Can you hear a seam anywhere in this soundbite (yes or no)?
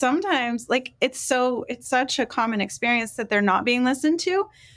yes